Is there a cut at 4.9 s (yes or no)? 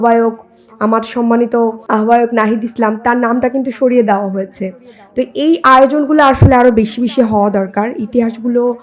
no